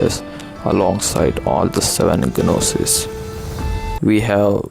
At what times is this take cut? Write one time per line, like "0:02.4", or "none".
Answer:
0:03.8